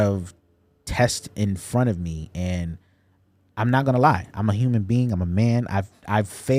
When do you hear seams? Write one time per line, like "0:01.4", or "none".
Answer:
none